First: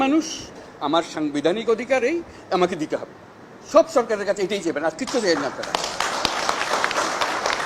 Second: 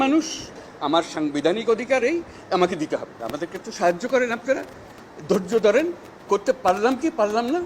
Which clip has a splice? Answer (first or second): second